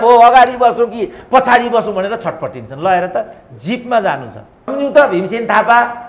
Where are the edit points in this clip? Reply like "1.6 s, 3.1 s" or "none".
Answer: 4.7 s